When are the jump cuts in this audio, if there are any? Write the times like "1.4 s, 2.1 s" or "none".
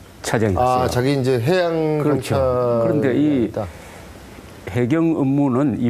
4.5 s